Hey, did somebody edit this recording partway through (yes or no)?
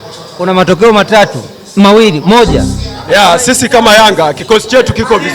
yes